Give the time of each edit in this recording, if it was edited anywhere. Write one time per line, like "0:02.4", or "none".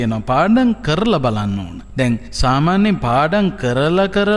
0:02.2